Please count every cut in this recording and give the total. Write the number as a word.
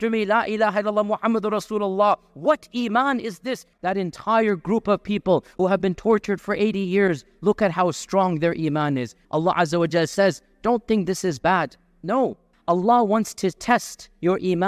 three